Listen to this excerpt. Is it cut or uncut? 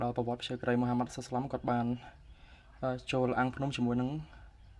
uncut